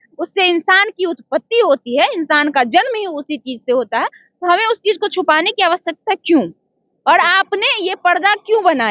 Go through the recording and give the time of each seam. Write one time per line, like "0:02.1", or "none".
none